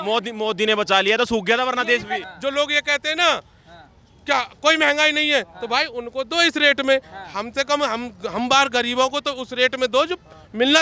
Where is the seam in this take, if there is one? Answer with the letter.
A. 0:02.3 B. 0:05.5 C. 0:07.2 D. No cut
A